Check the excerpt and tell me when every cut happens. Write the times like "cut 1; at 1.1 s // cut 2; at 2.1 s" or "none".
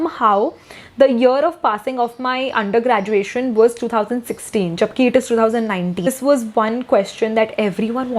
cut 1; at 6.1 s